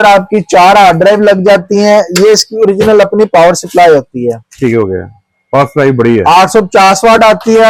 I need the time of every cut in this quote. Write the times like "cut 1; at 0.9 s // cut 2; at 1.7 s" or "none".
none